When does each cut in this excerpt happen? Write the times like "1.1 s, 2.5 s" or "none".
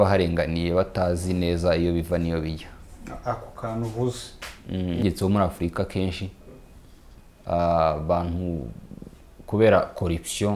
5.0 s